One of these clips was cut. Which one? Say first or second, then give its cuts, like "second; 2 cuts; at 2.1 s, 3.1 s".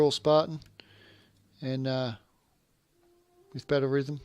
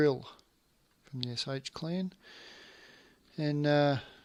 first; 1 cut; at 1.9 s